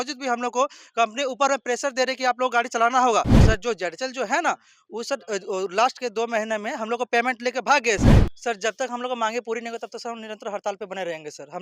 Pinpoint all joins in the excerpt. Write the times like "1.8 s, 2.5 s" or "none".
3.4 s, 8.1 s